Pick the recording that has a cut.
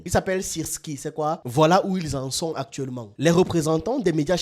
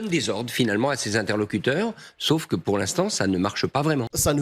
first; 2 cuts; at 1.4 s, 3.0 s

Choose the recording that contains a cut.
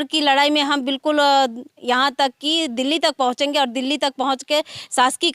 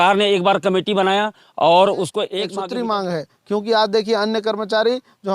second; 1 cut; at 2.5 s

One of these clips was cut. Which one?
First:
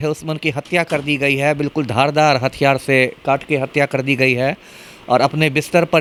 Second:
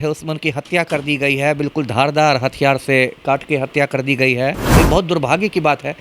second; 1 cut; at 4.7 s

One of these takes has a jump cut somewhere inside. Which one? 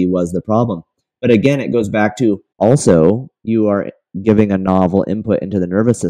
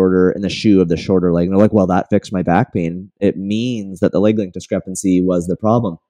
first; 1 cut; at 2.5 s

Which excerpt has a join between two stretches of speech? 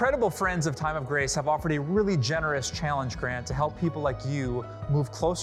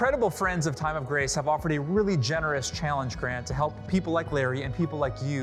first; 1 cut; at 3.8 s

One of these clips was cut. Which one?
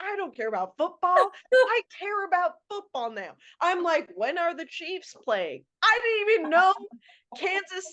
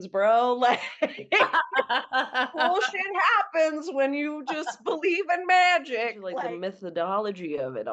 second; 1 cut; at 6.2 s

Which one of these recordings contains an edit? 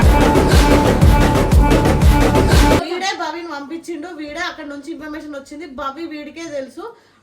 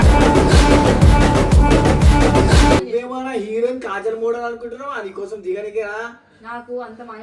first; 1 cut; at 2.8 s

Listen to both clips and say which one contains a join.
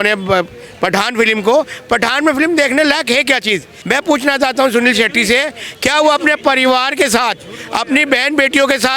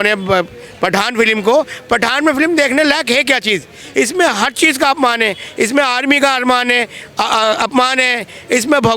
first; 1 cut; at 3.7 s

